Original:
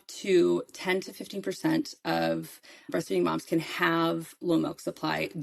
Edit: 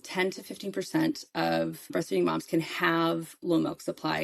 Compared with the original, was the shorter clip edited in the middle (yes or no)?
yes